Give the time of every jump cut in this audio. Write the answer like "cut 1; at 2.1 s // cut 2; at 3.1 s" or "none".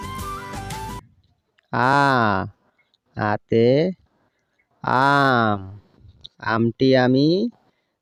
none